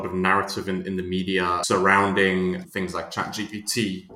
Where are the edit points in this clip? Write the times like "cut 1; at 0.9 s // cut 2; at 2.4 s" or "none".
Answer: cut 1; at 1.6 s // cut 2; at 2.7 s